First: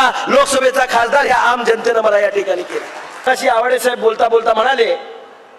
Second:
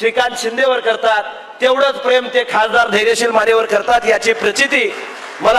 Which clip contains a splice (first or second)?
first